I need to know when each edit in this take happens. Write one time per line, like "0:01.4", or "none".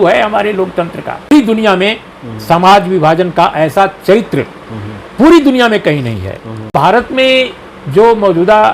0:01.3
0:06.7